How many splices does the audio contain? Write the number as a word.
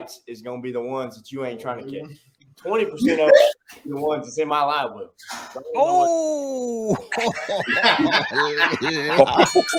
zero